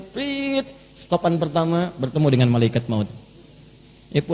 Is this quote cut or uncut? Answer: uncut